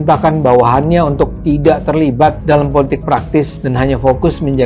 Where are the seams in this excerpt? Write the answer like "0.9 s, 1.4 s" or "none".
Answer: 2.4 s, 3.6 s

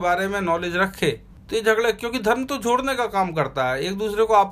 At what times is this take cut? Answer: 1.3 s

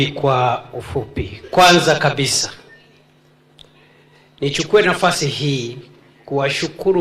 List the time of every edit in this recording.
2.3 s

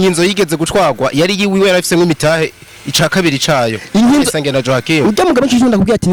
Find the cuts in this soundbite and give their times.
none

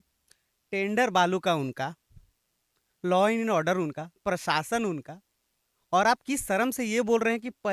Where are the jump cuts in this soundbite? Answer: none

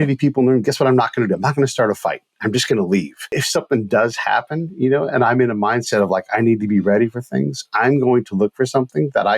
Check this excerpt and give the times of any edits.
3.3 s

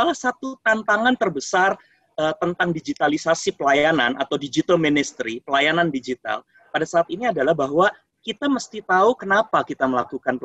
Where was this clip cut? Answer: none

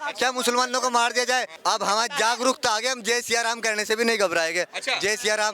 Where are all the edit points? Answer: 1.5 s

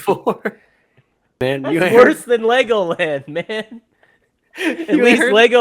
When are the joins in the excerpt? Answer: 1.4 s

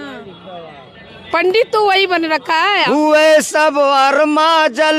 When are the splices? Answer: 2.8 s

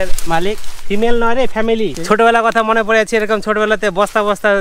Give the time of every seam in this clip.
1.9 s

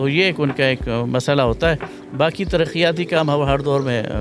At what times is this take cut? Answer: none

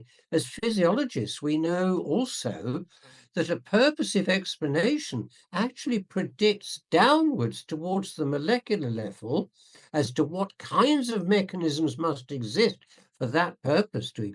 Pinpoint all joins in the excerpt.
none

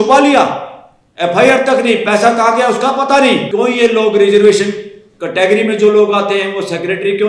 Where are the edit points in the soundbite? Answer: 3.5 s

